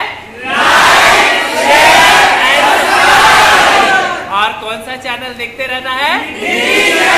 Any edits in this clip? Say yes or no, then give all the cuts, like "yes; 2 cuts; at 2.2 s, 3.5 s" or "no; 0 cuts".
no; 0 cuts